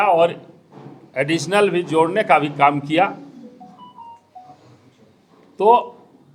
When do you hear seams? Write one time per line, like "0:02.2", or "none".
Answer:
none